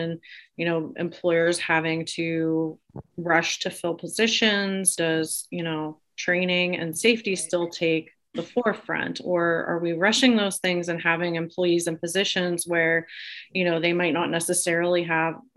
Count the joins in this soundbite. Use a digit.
1